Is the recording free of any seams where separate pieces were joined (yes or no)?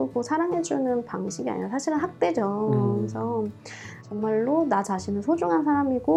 yes